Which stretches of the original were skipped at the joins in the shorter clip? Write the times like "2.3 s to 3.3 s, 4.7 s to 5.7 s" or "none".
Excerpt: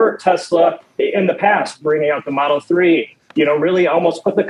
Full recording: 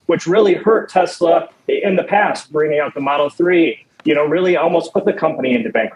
none